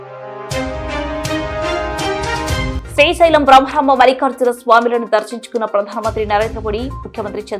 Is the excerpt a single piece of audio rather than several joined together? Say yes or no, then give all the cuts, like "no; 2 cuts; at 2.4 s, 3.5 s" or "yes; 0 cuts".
yes; 0 cuts